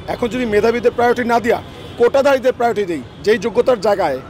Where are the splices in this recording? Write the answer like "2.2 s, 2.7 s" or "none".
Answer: 3.1 s